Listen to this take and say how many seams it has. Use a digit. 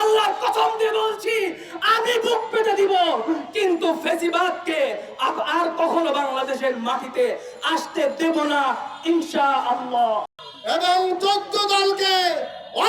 1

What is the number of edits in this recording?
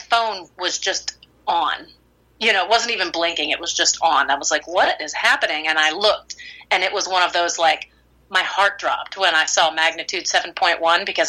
0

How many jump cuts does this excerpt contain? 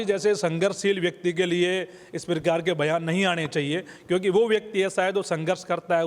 0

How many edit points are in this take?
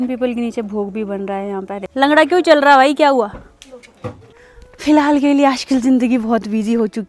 2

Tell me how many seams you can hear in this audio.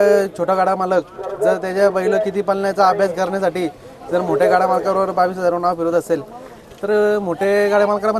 0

